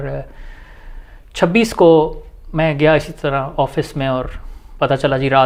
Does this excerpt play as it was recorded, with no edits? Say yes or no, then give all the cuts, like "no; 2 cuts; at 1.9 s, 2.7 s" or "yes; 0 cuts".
yes; 0 cuts